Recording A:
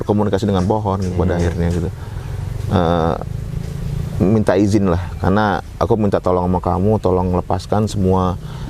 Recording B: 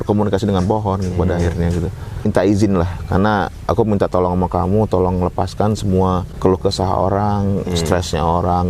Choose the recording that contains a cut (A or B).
B